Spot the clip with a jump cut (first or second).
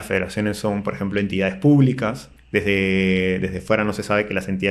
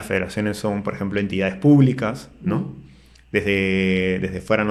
first